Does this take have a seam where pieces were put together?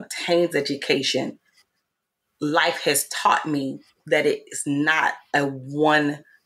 no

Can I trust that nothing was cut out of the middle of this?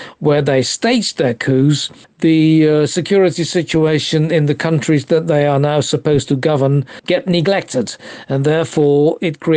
yes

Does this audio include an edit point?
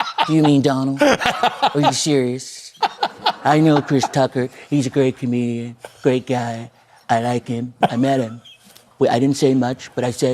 yes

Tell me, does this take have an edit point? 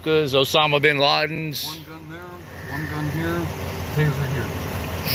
no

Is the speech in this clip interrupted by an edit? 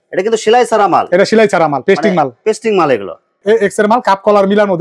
yes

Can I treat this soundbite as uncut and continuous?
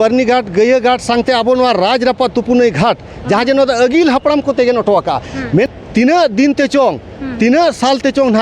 no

